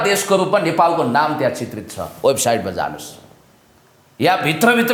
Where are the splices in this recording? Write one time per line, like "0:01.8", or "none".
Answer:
none